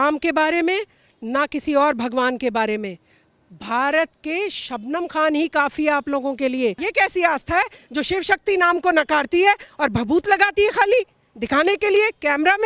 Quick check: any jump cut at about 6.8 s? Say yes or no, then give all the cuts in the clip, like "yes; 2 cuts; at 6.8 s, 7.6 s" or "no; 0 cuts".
yes; 1 cut; at 6.8 s